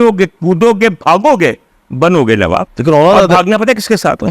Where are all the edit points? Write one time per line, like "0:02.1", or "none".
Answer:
0:02.7